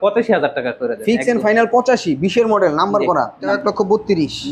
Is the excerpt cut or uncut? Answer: cut